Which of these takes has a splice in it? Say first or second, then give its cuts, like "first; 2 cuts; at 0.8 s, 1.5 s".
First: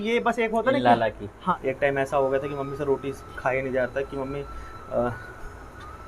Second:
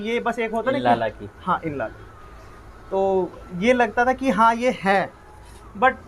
first; 1 cut; at 1.6 s